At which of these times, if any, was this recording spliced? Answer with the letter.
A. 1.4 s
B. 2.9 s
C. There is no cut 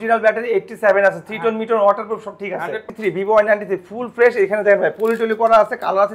B